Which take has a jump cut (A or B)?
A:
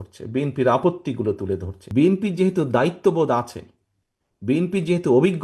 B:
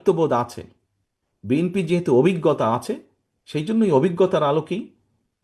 A